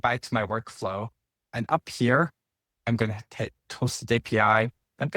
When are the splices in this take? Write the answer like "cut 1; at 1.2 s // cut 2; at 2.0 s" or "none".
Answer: none

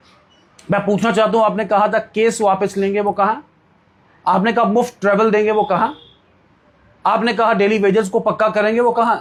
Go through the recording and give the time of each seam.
none

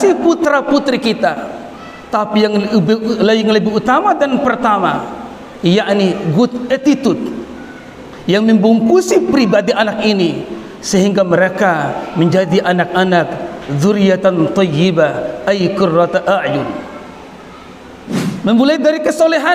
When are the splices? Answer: cut 1; at 18.1 s

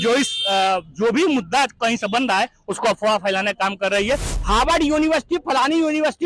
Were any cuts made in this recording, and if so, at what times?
cut 1; at 4.3 s

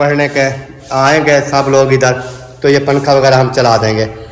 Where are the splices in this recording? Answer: none

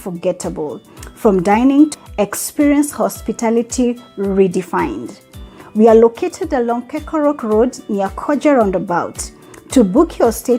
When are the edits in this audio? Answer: none

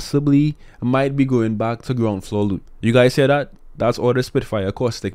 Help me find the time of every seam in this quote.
cut 1; at 2.7 s

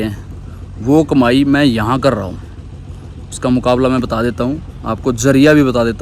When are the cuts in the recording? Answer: none

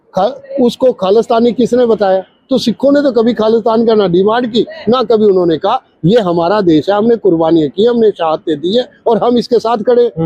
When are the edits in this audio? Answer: none

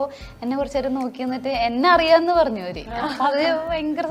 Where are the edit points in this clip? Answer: none

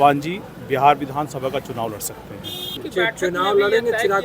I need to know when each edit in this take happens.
cut 1; at 2.8 s

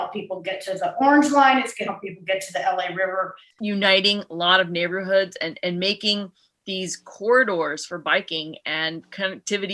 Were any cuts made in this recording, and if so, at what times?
cut 1; at 3.4 s

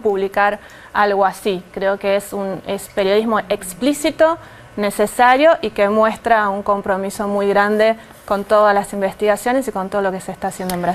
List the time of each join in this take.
cut 1; at 8.8 s

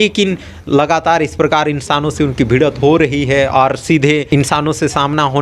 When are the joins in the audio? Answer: cut 1; at 4.3 s

